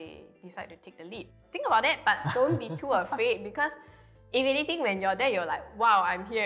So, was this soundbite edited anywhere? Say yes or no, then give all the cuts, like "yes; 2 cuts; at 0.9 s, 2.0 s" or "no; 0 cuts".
yes; 1 cut; at 1.3 s